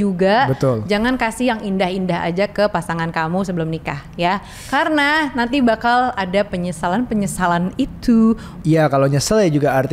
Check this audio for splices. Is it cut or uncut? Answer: cut